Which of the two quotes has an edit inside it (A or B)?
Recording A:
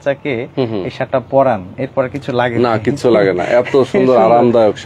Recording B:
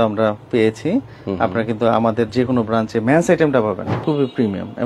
B